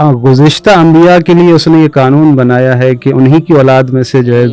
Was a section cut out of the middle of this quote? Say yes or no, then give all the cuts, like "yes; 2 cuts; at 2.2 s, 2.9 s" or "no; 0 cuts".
no; 0 cuts